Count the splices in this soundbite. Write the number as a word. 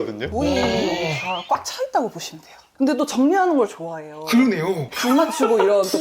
zero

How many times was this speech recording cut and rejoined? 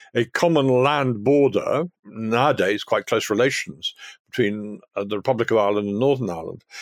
one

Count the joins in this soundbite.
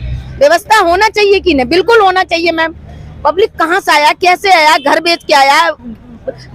zero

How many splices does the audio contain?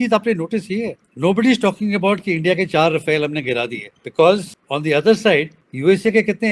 zero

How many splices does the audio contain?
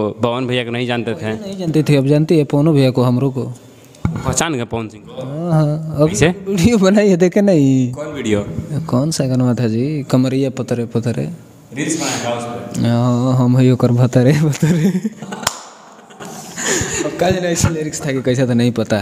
zero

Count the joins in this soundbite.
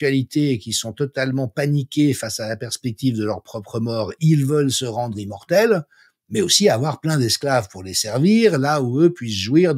zero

